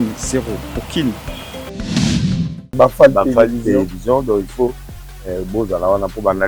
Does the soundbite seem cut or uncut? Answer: cut